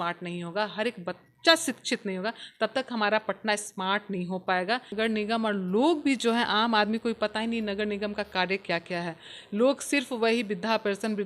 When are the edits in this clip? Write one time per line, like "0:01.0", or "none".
0:04.9

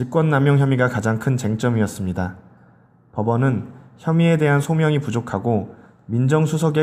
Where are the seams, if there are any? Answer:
none

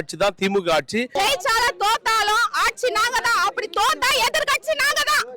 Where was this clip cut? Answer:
0:01.1

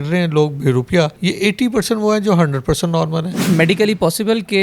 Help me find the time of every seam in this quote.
0:01.2
0:03.5

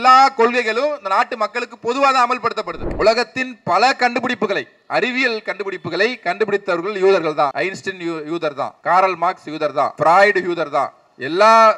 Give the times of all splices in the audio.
0:02.9
0:08.8

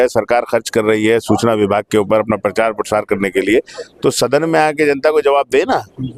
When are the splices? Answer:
none

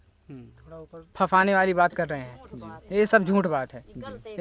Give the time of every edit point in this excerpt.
0:01.0

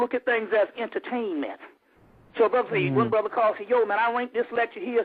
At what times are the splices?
0:03.8

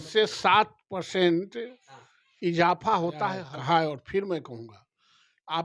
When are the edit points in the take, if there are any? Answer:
0:03.5

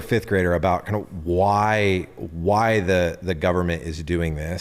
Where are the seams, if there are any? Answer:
none

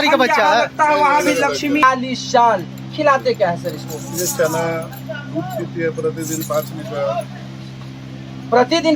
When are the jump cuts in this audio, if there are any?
0:01.8

